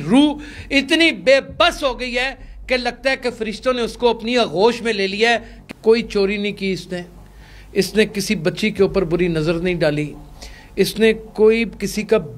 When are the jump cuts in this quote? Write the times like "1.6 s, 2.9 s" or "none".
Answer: 5.5 s